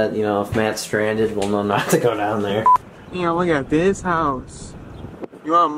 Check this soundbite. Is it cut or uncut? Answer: cut